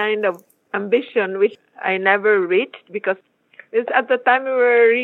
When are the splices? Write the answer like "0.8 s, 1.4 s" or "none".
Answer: 1.6 s, 3.3 s